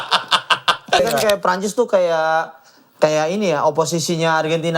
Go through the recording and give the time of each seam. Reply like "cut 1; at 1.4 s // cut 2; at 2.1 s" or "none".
cut 1; at 1.0 s